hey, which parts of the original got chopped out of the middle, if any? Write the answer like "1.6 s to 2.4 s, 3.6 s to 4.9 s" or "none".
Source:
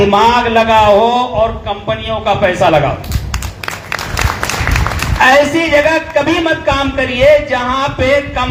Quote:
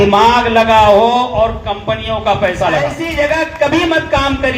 3.0 s to 5.6 s